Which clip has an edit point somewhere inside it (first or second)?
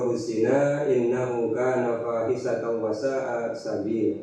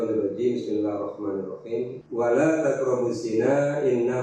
second